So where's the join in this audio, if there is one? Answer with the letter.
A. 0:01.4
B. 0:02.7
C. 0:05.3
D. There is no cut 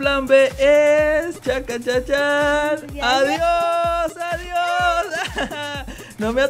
D